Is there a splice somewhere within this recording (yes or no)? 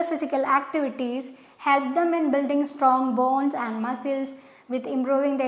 no